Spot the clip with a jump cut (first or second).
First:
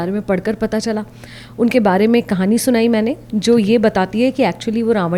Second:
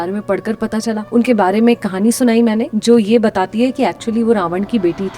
second